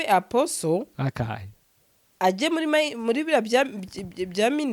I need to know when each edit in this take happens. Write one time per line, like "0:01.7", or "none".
none